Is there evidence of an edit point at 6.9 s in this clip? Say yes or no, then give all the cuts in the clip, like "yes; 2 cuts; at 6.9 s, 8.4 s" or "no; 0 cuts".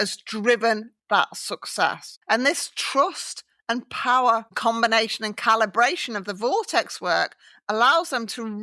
no; 2 cuts; at 2.1 s, 4.5 s